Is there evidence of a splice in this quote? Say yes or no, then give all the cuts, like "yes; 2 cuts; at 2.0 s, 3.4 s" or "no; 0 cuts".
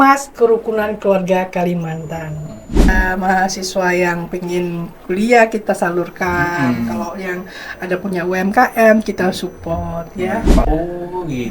yes; 2 cuts; at 2.9 s, 10.6 s